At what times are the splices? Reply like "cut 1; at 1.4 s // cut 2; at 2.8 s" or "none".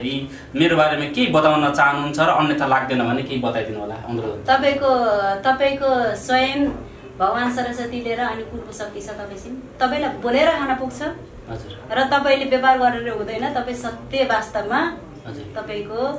none